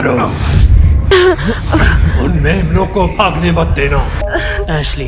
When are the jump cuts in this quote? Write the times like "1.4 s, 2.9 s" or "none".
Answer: 1.1 s, 4.2 s